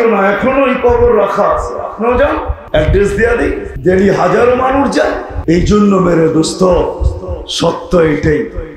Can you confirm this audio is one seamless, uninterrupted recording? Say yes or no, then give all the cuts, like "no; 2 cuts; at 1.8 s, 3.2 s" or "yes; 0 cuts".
no; 3 cuts; at 2.5 s, 3.7 s, 5.3 s